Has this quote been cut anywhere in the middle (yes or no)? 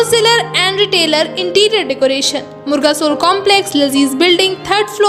no